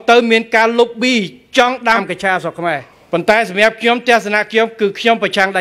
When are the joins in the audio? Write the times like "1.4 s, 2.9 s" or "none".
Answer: 2.9 s